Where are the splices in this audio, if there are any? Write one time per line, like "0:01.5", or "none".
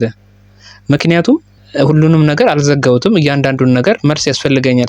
0:01.5